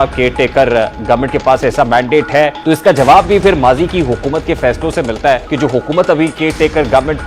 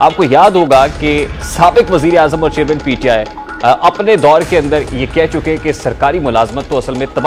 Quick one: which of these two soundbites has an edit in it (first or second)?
first